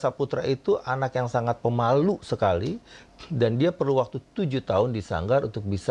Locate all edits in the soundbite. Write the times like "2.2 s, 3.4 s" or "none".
none